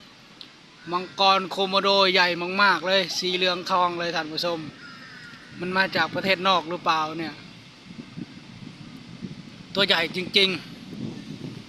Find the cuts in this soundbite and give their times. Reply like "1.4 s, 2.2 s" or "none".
none